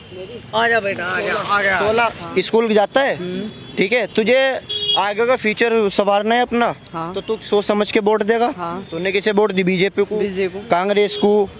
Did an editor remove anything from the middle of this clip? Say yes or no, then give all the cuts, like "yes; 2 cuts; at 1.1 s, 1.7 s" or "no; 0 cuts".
no; 0 cuts